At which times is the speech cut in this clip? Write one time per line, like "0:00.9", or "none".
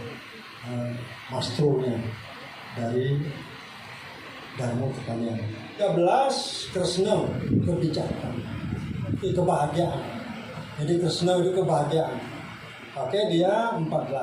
0:05.8